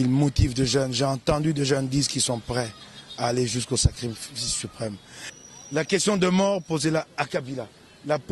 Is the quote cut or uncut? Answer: cut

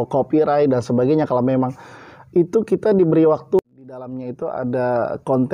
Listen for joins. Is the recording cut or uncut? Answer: cut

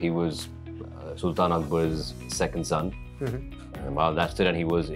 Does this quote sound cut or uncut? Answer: uncut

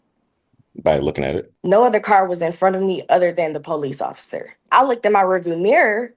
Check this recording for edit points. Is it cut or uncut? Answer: cut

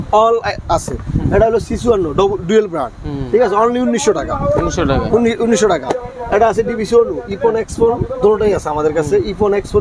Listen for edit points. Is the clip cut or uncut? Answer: uncut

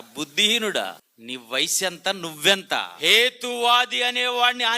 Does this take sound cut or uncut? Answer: cut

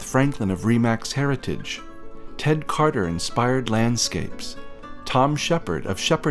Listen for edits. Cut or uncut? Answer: uncut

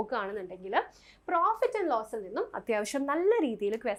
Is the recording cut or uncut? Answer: uncut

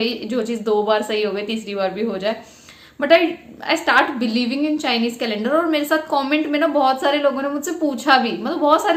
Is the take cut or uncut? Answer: uncut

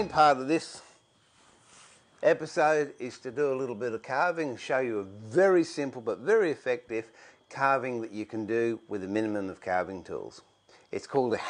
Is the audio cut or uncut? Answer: uncut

